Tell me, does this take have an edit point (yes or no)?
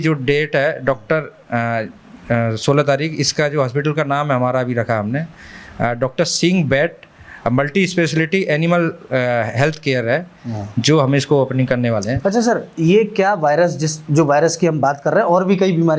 no